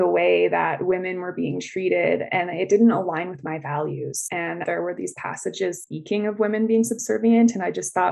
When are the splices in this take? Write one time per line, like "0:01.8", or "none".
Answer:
0:04.6

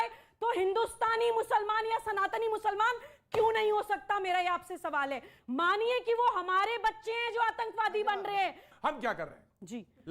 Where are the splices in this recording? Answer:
0:05.3
0:08.7

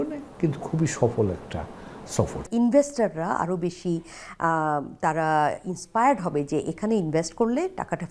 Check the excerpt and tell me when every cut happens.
0:02.4

